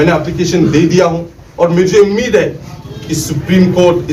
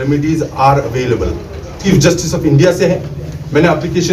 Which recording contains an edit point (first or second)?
second